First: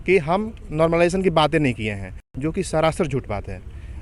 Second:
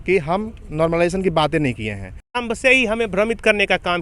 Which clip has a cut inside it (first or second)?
second